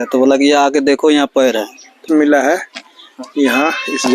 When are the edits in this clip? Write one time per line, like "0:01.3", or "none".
0:02.0